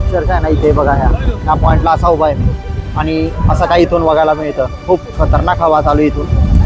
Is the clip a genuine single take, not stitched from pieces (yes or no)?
yes